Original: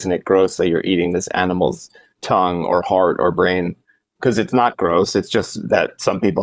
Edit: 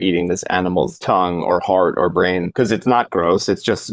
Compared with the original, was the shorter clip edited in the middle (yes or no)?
yes